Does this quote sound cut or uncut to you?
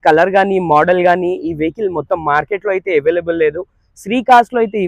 uncut